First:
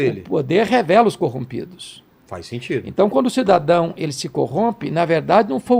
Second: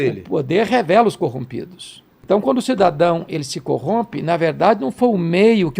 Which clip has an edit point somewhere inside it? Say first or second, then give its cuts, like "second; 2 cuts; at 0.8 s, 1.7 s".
second; 1 cut; at 2.2 s